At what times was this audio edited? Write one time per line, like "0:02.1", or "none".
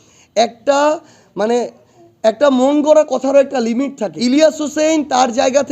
0:04.1